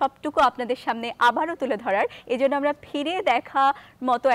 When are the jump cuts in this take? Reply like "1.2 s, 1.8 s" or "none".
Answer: none